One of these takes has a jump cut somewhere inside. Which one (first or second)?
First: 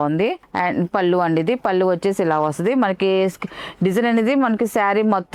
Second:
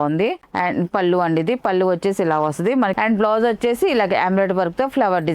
second